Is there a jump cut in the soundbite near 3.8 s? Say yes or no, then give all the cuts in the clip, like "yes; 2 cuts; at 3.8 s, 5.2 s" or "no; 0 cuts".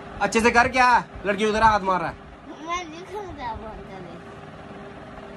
no; 0 cuts